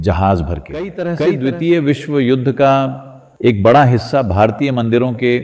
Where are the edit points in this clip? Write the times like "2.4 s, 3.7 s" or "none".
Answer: 1.1 s